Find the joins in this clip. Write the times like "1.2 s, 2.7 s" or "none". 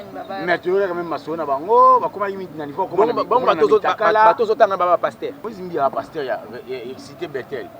5.5 s